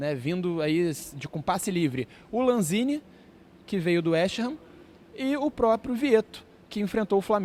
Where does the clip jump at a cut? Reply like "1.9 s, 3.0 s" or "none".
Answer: none